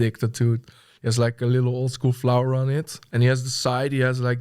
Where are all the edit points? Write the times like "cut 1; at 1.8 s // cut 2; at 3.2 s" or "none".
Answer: cut 1; at 3.0 s